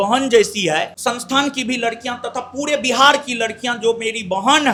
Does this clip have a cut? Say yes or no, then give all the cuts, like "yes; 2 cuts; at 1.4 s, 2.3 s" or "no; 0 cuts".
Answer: no; 0 cuts